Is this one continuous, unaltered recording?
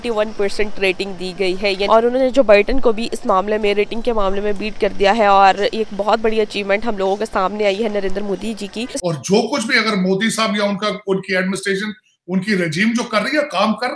no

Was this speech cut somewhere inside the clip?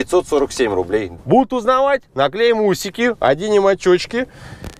yes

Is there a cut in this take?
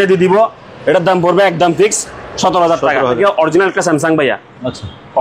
yes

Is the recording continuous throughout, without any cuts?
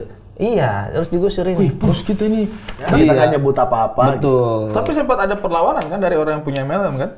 no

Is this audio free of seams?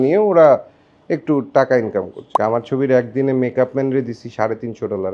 no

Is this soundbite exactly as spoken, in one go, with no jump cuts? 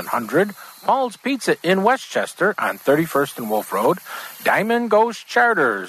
yes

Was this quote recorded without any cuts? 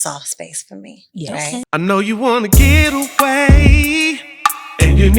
no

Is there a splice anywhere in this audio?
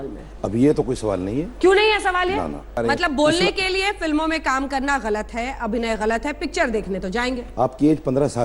yes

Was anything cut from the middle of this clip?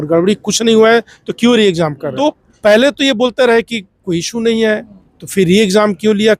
yes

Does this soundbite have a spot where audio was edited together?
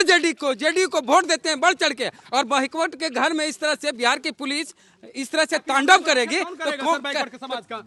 no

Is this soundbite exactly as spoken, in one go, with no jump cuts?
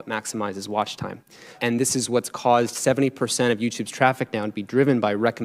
no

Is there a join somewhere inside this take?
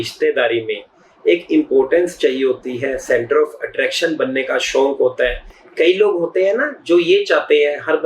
no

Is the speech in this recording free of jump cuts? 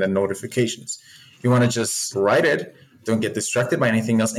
no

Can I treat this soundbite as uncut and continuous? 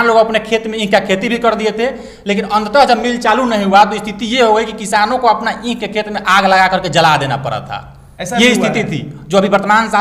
yes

